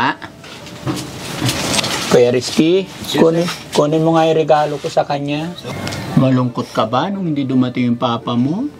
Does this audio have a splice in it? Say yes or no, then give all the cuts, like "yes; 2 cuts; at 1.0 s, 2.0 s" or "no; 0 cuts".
yes; 1 cut; at 5.6 s